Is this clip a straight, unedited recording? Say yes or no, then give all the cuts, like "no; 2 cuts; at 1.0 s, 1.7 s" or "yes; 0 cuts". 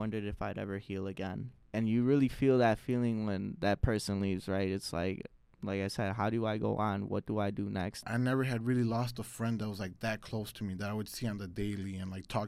no; 2 cuts; at 1.6 s, 8.0 s